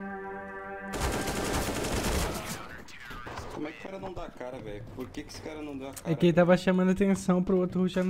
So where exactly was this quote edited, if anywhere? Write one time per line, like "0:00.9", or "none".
0:00.9

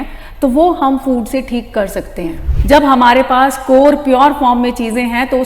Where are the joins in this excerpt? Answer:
0:02.5

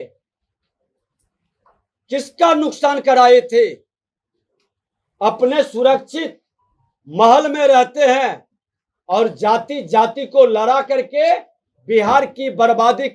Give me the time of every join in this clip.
none

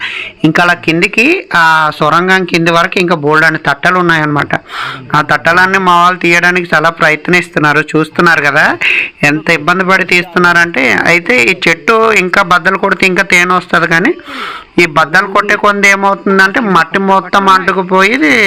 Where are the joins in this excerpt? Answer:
none

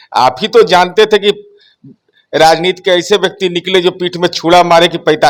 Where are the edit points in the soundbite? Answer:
none

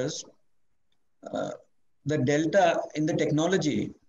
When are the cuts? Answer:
none

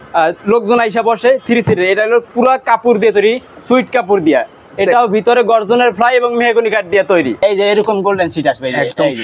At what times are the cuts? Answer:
0:07.4

